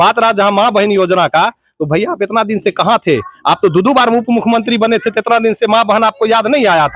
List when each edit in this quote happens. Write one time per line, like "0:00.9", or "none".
none